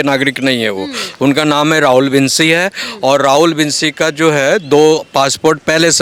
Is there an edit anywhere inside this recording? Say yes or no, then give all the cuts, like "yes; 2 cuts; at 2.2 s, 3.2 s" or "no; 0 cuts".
no; 0 cuts